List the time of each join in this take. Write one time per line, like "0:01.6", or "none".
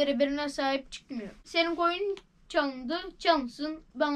0:01.4